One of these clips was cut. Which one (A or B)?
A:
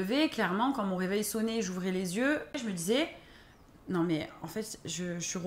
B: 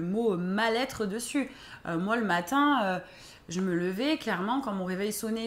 A